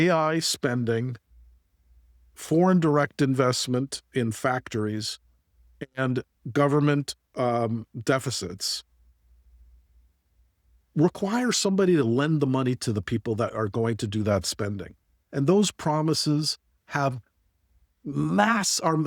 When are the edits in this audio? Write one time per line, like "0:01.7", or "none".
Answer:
none

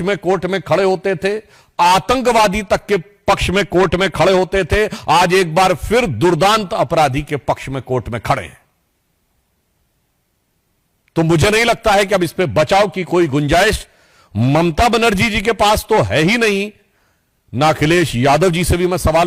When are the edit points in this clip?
none

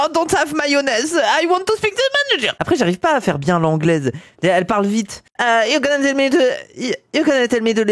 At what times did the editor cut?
0:02.5

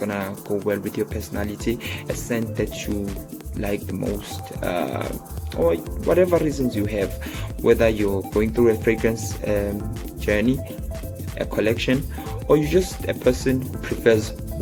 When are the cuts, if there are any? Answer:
none

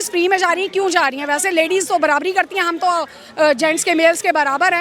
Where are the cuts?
none

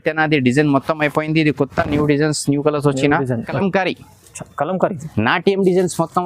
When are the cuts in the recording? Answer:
0:03.5

